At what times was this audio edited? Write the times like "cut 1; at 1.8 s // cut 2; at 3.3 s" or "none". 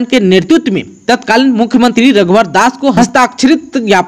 cut 1; at 3.0 s